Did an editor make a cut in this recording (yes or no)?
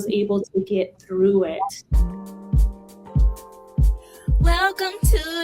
yes